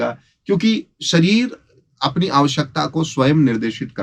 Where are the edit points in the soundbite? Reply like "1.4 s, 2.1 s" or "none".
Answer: none